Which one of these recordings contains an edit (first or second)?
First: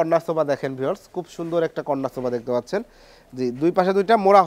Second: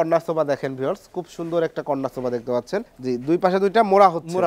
second